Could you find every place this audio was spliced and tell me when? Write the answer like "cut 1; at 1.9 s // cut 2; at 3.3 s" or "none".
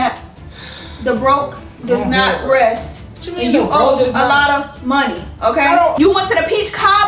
cut 1; at 5.9 s